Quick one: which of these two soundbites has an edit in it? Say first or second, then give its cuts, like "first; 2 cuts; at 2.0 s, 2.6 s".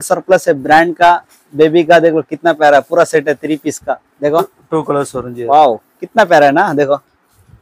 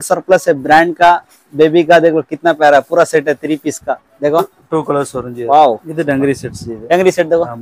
second; 1 cut; at 5.9 s